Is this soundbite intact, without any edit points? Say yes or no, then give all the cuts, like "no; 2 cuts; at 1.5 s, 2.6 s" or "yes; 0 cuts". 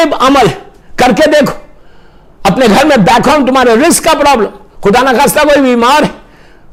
yes; 0 cuts